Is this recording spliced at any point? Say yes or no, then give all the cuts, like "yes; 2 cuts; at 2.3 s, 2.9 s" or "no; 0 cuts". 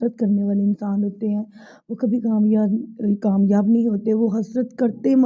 no; 0 cuts